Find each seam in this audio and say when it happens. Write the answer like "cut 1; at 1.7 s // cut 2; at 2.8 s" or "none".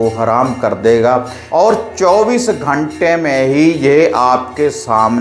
cut 1; at 1.4 s